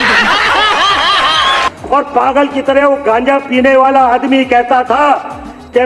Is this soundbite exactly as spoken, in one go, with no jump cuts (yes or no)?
no